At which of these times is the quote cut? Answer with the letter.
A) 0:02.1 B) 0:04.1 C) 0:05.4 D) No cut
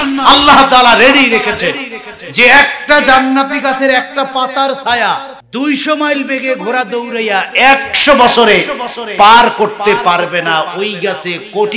C